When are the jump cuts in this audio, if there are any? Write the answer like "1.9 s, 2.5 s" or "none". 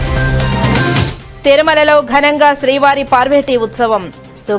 1.1 s